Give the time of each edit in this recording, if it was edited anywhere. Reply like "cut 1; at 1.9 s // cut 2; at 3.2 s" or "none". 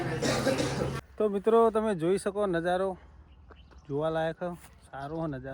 cut 1; at 1.0 s